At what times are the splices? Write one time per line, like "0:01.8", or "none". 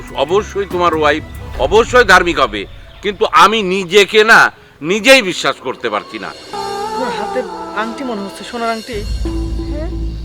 0:06.5